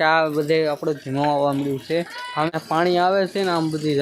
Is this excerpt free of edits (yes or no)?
no